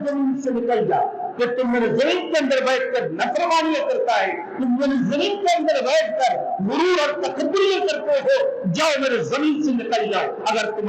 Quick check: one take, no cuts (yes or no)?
yes